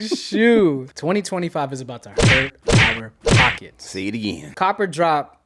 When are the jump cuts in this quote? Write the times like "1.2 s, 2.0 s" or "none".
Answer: 0.9 s, 4.5 s